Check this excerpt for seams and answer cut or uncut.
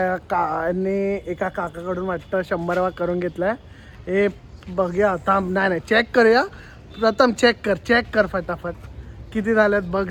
uncut